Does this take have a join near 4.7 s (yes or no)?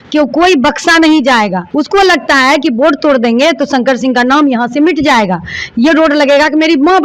no